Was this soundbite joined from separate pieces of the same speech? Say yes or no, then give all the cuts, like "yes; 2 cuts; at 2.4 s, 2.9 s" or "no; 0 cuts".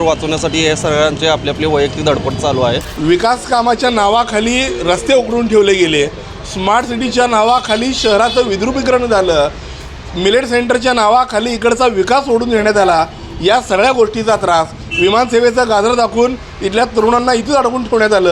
yes; 1 cut; at 2.9 s